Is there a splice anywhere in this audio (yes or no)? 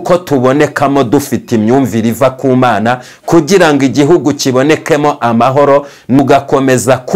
yes